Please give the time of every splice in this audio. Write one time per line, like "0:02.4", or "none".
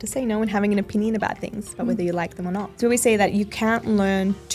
0:02.7